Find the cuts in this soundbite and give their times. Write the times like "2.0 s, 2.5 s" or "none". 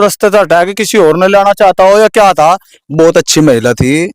2.7 s